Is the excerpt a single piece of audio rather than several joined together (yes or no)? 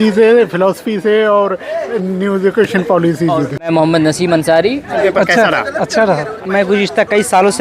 no